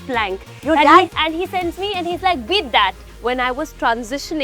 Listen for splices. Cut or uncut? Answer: cut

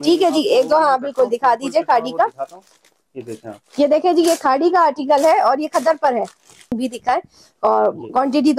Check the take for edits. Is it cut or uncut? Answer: cut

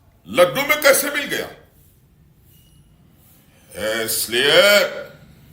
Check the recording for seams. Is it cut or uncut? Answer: uncut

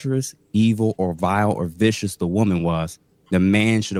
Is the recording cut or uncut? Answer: uncut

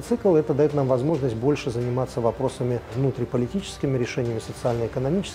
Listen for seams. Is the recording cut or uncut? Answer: cut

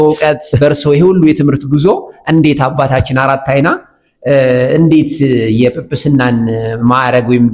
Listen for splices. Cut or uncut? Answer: uncut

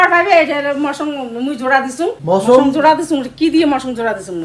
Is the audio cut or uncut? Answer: cut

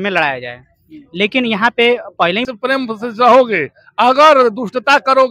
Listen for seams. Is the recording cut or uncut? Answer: cut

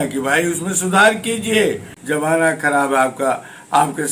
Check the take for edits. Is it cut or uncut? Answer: cut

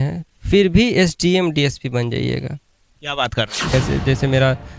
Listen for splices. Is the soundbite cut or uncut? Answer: cut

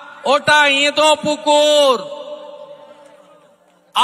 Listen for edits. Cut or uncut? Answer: uncut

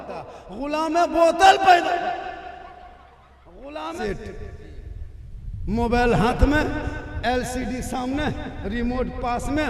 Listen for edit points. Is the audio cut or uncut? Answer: cut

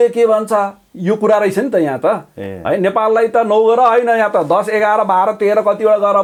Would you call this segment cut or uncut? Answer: uncut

